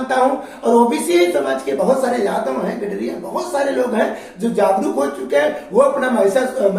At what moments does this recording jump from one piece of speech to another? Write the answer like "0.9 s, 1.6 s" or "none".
none